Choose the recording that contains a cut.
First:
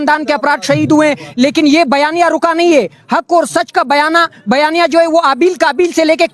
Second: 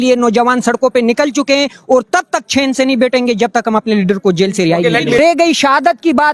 second; 1 cut; at 5.2 s

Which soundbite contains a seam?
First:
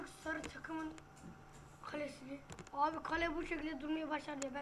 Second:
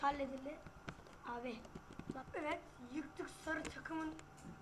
second; 1 cut; at 2.2 s

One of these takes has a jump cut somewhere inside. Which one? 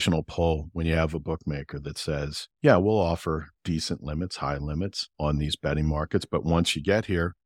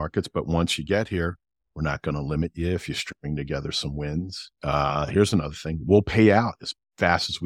first; 3 cuts; at 2.4 s, 3.5 s, 5.0 s

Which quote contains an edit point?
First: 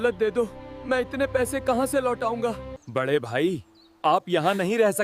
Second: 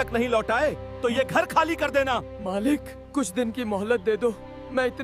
first; 1 cut; at 2.8 s

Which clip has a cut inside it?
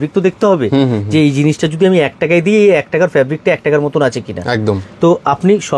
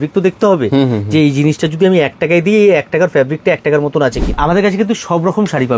second; 1 cut; at 4.4 s

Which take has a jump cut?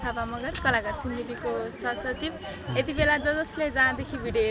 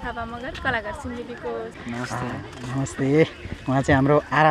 second; 1 cut; at 1.8 s

